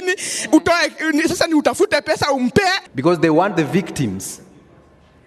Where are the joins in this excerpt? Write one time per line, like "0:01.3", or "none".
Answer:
0:02.9